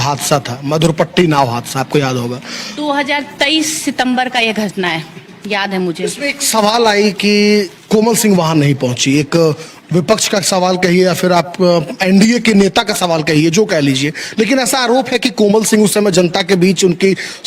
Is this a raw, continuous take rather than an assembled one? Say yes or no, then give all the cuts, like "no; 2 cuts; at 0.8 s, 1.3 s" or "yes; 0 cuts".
yes; 0 cuts